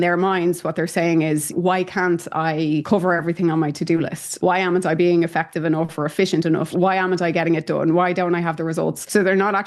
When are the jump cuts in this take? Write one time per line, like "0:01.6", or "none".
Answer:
none

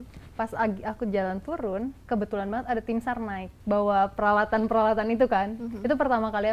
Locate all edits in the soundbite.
0:02.0
0:03.5

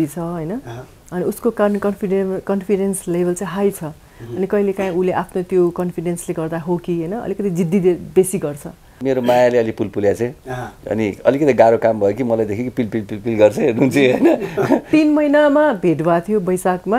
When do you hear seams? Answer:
0:09.0
0:14.9

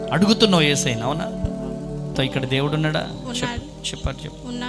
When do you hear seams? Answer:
0:02.1

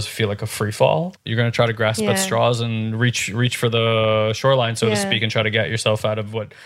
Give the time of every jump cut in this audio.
0:01.2

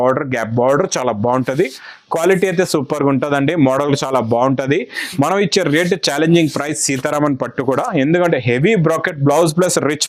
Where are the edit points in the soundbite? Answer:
none

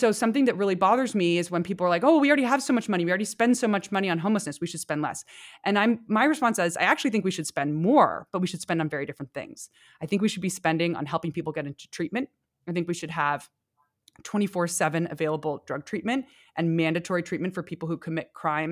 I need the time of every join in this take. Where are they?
none

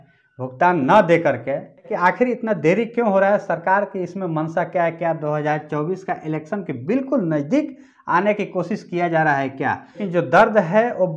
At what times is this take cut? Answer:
0:01.9
0:10.0

